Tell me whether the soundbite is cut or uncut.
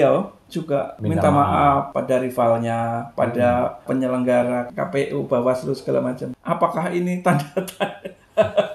cut